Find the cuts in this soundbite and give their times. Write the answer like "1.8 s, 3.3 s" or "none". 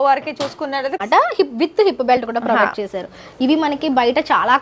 1.0 s